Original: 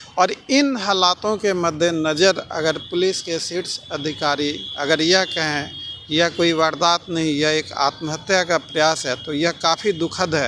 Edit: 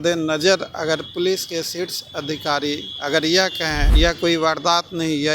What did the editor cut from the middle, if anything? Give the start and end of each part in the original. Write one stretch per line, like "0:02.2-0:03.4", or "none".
0:05.6-0:06.0